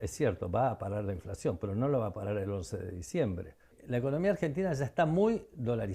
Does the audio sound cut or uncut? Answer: cut